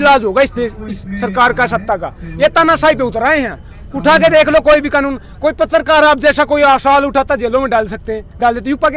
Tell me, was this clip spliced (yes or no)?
no